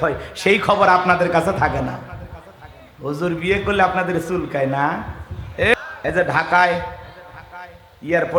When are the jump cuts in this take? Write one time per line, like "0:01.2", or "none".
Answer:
0:05.7